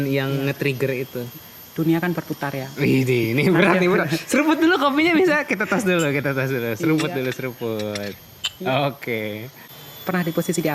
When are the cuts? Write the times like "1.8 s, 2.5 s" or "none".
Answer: 9.5 s